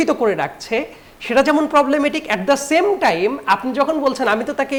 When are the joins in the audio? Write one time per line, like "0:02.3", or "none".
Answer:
none

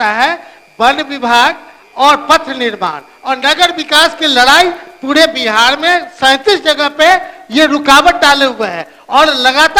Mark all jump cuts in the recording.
none

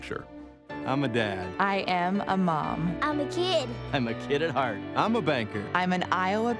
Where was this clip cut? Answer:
none

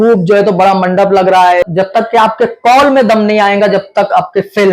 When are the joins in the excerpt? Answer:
0:01.7

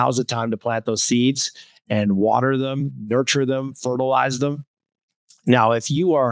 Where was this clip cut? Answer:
none

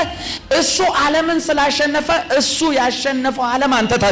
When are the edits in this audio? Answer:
none

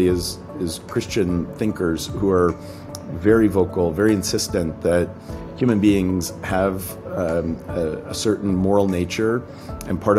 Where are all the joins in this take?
none

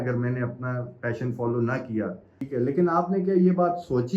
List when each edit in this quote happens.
0:02.5

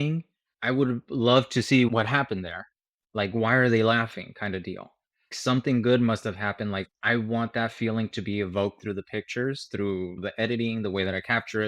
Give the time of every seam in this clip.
0:01.9

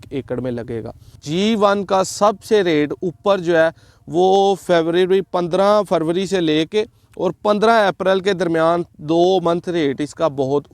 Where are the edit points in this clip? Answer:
0:01.2

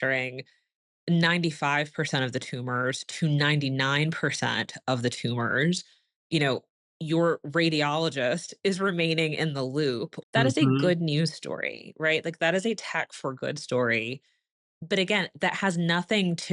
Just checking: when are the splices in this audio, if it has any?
0:10.1

